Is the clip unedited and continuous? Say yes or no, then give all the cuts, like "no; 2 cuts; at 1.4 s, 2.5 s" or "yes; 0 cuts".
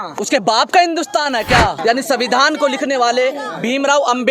no; 1 cut; at 1.8 s